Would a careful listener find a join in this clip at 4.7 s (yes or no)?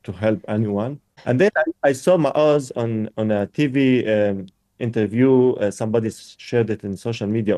no